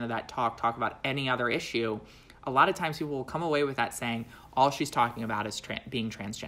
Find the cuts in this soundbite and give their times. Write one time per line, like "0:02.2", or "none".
none